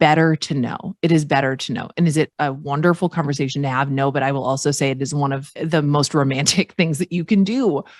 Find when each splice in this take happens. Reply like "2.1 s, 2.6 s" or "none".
2.3 s, 5.5 s